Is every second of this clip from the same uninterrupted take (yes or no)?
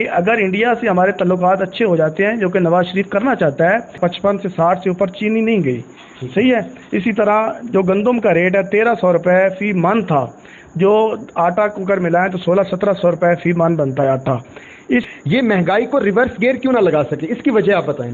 no